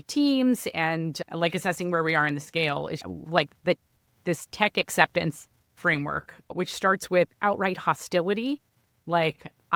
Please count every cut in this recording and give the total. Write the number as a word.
zero